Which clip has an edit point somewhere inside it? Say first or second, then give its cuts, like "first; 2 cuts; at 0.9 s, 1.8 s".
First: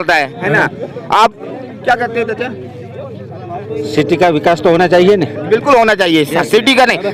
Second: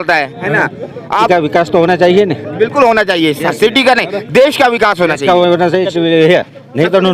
second; 2 cuts; at 1.3 s, 5.9 s